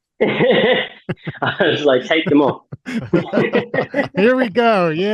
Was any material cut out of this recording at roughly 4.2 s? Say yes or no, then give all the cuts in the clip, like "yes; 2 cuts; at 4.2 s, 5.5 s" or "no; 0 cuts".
yes; 1 cut; at 4.2 s